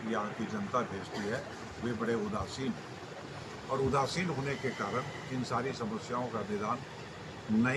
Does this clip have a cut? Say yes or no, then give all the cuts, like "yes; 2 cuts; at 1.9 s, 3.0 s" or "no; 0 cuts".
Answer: no; 0 cuts